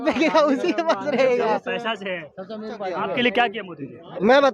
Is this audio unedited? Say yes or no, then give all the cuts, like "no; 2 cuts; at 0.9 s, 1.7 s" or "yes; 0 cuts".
no; 1 cut; at 3.1 s